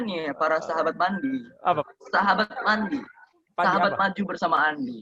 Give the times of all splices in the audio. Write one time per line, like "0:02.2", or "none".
0:01.8